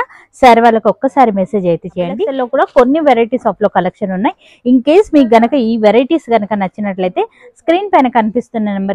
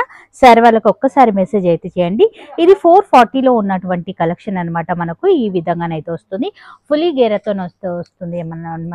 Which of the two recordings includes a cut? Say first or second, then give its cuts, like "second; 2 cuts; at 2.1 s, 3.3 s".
first; 1 cut; at 2.3 s